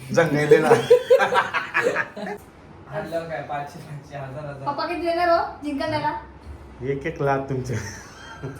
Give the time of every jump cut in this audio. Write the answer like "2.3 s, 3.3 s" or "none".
2.4 s